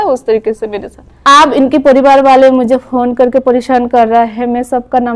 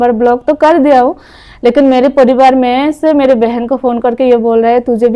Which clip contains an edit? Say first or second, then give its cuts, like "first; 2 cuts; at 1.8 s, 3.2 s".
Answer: first; 1 cut; at 1.2 s